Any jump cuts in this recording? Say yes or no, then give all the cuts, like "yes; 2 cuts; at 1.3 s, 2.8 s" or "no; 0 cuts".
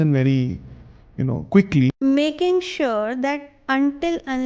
yes; 1 cut; at 1.9 s